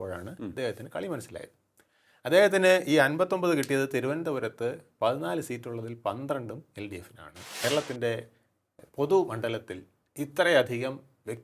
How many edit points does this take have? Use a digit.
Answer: 1